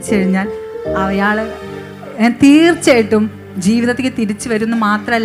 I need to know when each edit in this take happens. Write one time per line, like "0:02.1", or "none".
none